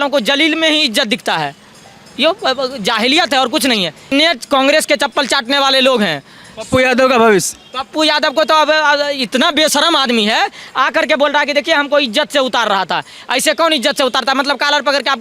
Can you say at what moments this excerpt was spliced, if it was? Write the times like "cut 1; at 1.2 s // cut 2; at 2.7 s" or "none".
cut 1; at 4.1 s